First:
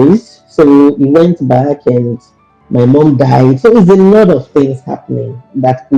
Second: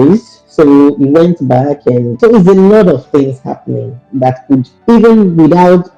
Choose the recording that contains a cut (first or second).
second